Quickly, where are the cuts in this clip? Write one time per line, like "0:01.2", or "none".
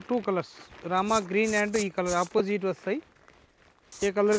none